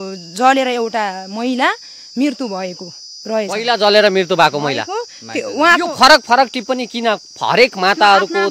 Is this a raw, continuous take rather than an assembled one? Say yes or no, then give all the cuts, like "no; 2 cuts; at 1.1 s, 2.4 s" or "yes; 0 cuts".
yes; 0 cuts